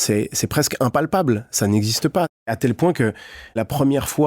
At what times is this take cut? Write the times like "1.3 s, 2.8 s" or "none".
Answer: 2.5 s, 3.6 s